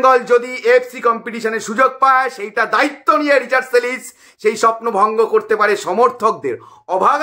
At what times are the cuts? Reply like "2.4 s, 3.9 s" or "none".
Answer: none